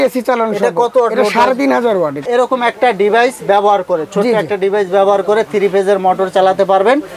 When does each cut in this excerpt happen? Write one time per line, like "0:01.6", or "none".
0:02.3